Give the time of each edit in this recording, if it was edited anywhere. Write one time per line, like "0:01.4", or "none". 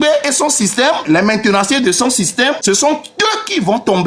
0:01.0
0:02.6